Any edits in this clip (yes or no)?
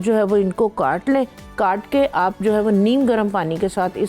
no